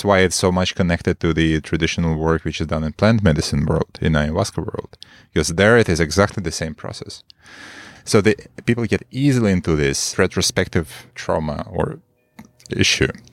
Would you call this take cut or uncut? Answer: cut